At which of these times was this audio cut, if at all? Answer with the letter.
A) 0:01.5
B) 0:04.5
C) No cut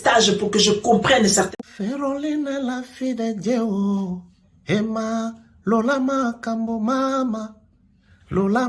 A